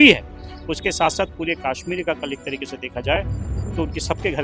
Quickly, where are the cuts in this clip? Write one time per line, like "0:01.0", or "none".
none